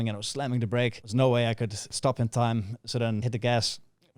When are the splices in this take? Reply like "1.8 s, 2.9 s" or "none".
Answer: 1.0 s, 1.8 s, 3.2 s